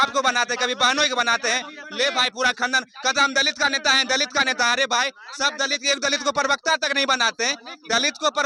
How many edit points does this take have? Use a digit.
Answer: 0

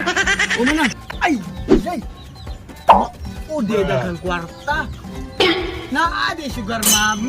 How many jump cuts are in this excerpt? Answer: 1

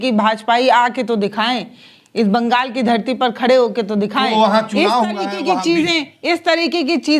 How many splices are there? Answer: 0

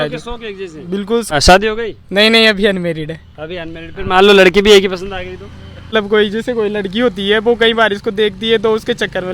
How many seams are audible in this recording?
2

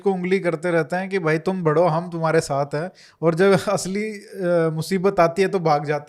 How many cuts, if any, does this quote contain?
0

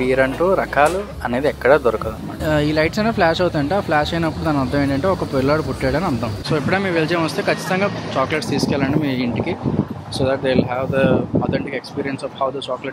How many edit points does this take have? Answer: 2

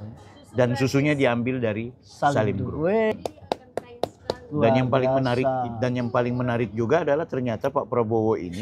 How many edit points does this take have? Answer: 1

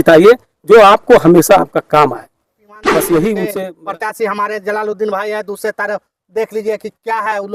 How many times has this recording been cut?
1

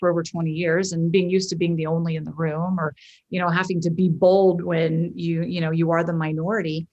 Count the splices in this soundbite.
0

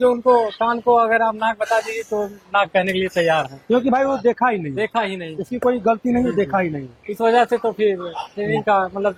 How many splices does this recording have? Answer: 0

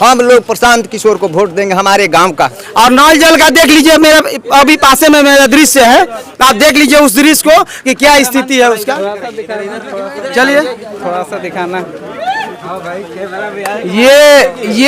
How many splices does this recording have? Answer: 1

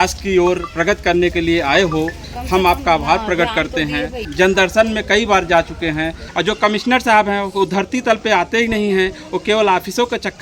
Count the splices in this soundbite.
2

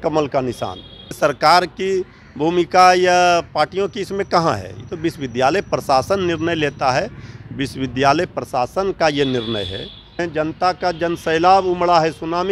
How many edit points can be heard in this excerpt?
2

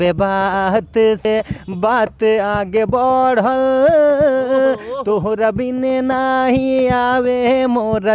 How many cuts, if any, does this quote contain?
1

